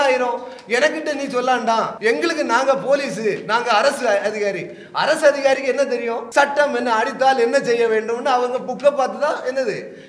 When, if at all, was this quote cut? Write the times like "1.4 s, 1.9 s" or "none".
1.9 s, 6.2 s